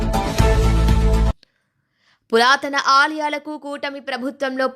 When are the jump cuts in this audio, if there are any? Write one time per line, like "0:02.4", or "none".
0:01.5

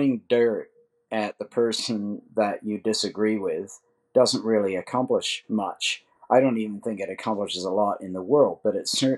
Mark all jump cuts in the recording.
none

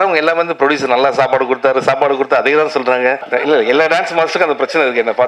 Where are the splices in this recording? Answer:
0:03.2

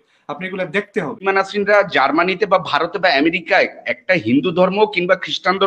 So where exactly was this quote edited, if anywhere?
0:01.2

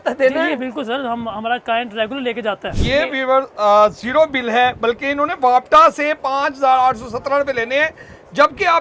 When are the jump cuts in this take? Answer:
0:02.7

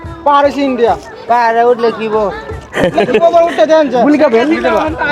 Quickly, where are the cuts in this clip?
none

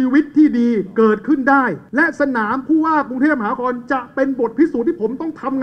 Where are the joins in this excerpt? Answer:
0:01.8

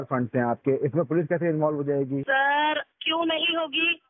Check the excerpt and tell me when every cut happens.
0:02.2

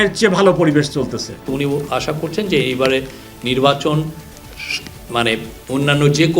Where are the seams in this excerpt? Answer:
0:01.4

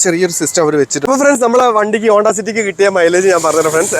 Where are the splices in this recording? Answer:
0:01.0

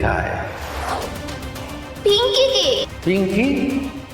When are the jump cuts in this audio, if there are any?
0:02.0

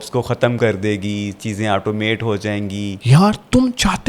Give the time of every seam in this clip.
0:02.9

